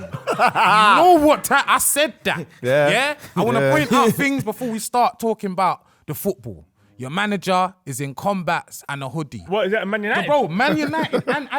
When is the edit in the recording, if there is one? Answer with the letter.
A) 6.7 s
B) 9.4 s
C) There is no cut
B